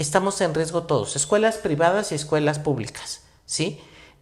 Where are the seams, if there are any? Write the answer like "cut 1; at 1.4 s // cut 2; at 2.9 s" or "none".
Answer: none